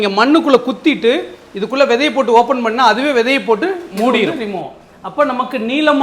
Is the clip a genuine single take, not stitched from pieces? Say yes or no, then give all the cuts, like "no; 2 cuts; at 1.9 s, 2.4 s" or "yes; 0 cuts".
no; 1 cut; at 4.3 s